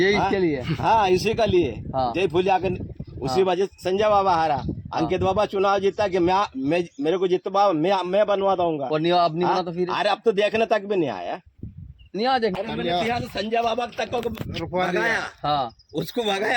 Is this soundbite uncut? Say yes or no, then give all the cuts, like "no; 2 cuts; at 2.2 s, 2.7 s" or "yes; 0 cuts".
no; 1 cut; at 12.5 s